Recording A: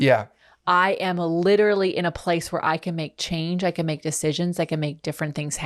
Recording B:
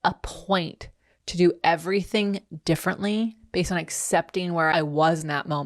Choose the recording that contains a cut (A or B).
B